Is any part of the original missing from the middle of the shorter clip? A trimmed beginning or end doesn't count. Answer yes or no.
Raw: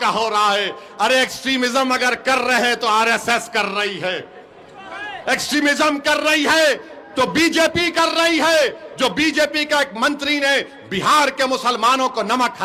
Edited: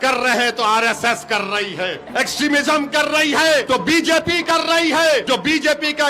yes